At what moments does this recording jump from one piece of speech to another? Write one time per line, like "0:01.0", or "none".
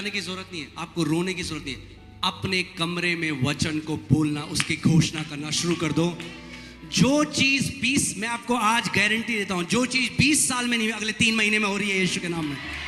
none